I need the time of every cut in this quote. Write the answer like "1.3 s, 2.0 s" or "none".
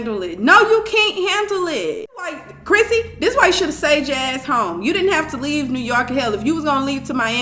2.3 s